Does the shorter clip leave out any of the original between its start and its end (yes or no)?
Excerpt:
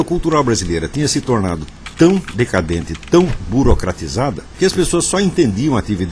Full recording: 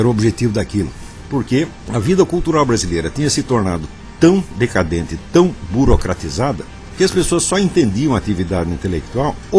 yes